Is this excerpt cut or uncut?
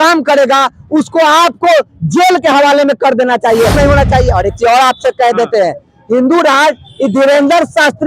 cut